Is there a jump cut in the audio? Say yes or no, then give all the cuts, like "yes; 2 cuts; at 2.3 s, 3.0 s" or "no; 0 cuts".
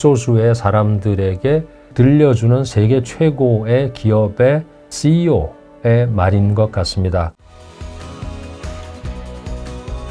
yes; 1 cut; at 7.3 s